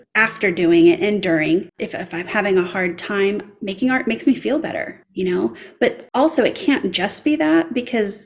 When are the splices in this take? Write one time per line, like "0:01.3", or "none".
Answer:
0:01.8
0:05.0
0:06.0